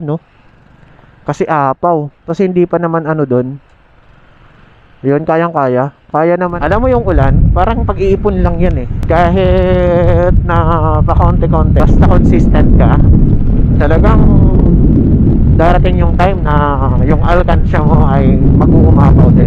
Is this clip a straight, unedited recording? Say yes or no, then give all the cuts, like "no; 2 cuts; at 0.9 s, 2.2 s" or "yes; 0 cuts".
no; 4 cuts; at 2.2 s, 6.5 s, 8.9 s, 11.8 s